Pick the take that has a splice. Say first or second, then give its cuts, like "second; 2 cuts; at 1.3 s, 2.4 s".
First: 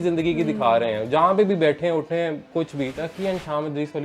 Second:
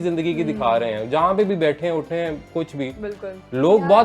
first; 1 cut; at 2.9 s